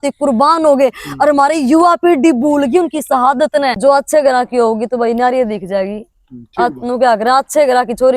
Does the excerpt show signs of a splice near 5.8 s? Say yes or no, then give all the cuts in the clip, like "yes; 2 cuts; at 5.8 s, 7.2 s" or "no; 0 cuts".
no; 1 cut; at 3.8 s